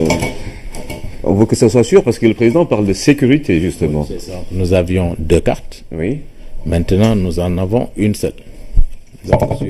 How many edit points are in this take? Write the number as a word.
one